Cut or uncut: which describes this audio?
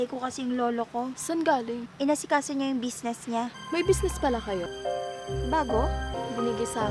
cut